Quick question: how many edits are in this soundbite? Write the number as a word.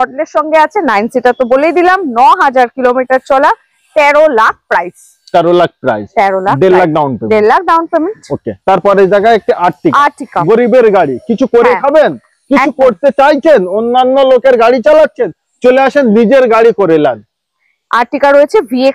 zero